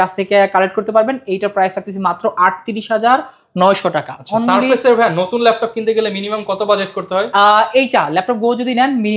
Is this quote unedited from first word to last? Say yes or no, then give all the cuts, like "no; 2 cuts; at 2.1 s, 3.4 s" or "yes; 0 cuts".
yes; 0 cuts